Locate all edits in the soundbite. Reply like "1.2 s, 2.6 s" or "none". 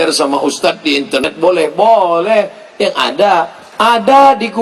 1.2 s